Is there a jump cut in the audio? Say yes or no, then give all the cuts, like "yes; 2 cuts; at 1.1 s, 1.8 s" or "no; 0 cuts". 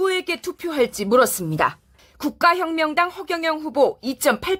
no; 0 cuts